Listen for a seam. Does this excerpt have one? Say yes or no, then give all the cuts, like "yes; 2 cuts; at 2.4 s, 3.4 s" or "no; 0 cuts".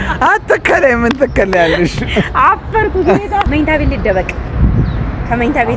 yes; 1 cut; at 3.5 s